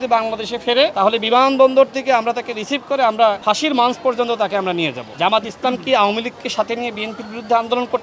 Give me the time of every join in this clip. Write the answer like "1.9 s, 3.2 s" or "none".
0.9 s, 3.4 s, 5.0 s

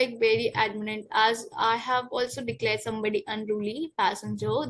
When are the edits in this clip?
none

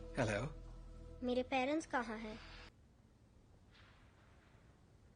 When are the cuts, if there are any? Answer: 2.7 s

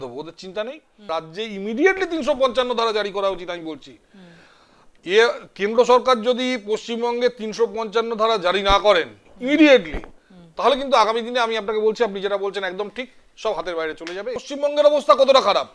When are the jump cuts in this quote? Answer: 1.1 s, 14.5 s

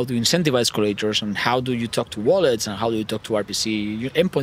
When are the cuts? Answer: none

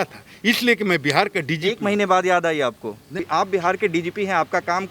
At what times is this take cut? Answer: 3.1 s

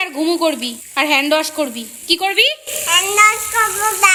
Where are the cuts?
none

